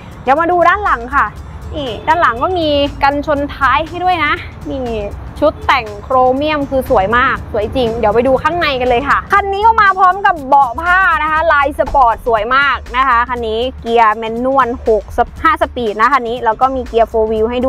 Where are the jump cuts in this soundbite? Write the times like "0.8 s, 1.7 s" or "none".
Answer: 9.2 s